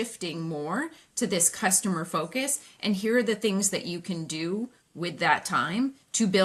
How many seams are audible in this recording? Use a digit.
0